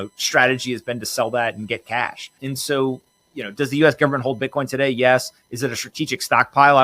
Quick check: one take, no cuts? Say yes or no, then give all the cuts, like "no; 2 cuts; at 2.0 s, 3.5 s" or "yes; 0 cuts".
no; 1 cut; at 2.4 s